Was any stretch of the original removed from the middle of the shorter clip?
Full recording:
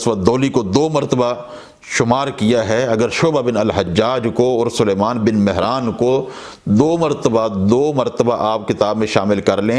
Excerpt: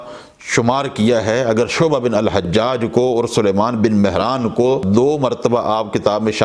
yes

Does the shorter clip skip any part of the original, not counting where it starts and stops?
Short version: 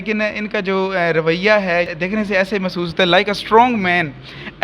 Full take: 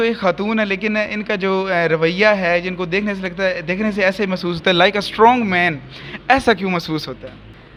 yes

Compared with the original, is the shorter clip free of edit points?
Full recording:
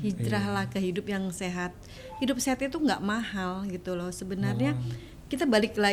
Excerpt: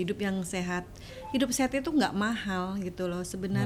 yes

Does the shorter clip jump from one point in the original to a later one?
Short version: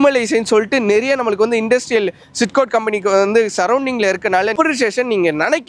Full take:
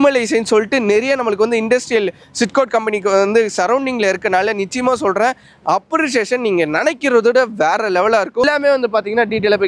yes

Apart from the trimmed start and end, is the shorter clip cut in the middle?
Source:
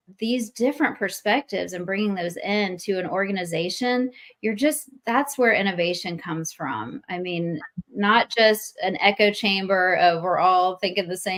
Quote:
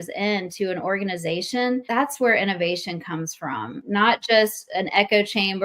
yes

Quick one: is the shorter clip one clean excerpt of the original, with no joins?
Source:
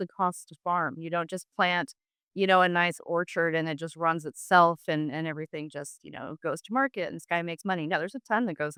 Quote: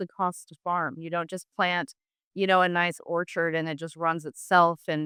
yes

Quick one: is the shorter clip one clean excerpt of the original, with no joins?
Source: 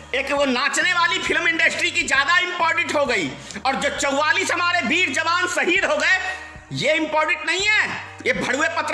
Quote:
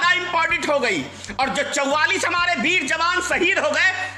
yes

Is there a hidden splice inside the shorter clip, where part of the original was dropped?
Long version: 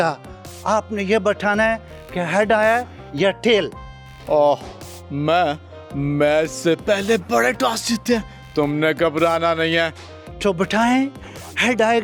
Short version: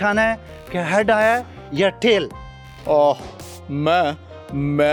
no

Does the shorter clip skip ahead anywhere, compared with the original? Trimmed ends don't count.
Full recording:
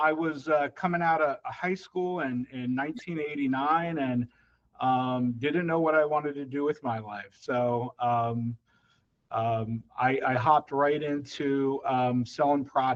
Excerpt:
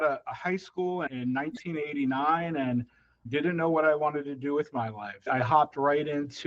yes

